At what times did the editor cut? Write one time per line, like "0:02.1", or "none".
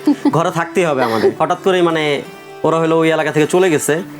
0:01.4